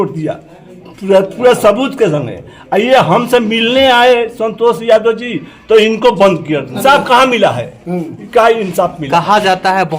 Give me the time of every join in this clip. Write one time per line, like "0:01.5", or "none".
0:06.8